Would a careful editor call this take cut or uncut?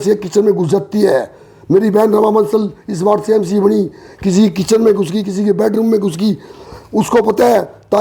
uncut